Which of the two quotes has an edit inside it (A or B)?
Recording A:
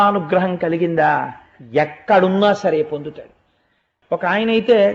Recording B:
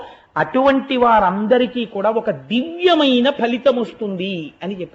A